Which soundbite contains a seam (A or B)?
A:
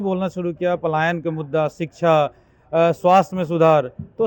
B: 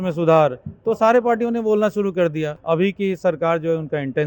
B